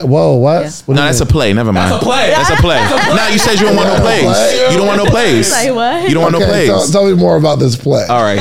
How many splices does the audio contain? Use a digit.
0